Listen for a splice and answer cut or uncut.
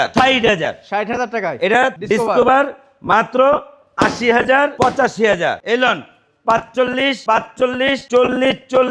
cut